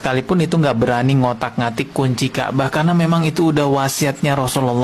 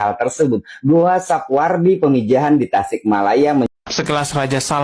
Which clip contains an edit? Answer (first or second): second